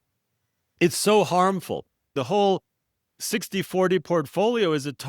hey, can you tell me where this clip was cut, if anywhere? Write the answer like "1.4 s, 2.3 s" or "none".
2.1 s